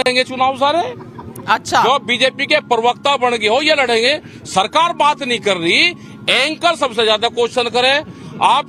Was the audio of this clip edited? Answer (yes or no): no